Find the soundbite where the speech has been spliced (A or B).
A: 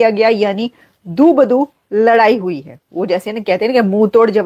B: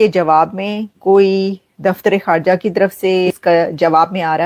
B